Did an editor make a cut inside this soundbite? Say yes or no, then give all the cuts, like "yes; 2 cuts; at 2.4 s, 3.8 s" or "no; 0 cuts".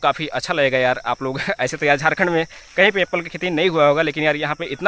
no; 0 cuts